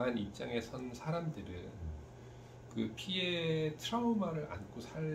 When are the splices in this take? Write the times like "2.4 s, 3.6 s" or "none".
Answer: none